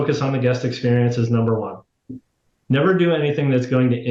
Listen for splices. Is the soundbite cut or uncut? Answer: cut